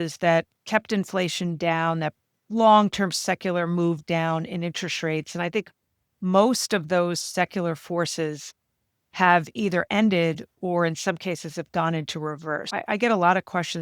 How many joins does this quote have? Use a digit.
1